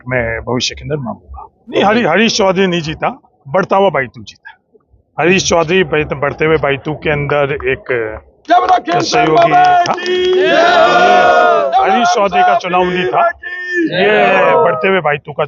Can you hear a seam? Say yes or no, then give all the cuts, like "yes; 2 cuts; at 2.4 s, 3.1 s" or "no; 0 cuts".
yes; 1 cut; at 1.7 s